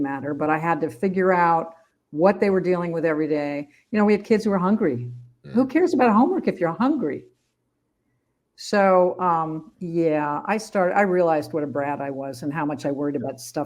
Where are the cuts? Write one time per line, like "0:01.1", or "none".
none